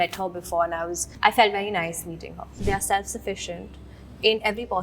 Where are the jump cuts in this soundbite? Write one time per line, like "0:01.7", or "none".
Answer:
0:02.5